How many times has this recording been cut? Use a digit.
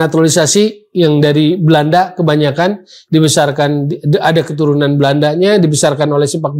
0